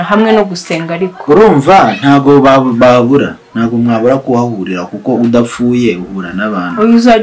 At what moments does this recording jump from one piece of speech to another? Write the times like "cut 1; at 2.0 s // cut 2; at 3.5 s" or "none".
none